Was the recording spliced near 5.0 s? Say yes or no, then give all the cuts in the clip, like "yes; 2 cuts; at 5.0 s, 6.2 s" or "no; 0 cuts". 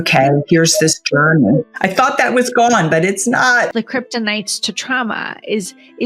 no; 2 cuts; at 1.7 s, 3.7 s